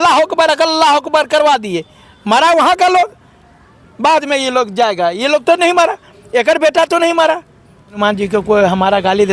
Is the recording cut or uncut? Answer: cut